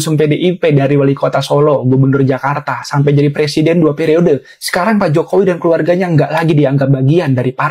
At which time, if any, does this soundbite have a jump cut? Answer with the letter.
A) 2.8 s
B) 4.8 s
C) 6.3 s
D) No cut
D